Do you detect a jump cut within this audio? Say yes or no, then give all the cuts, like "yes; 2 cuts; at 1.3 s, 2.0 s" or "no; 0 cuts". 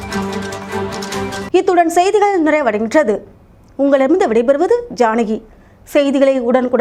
no; 0 cuts